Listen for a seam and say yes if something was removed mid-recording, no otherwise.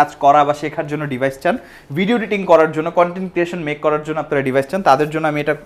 no